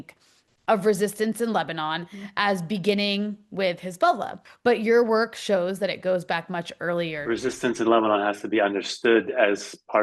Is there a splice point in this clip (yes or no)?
yes